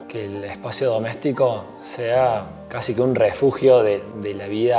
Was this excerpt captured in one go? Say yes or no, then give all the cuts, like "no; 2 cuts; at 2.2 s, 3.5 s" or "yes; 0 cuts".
yes; 0 cuts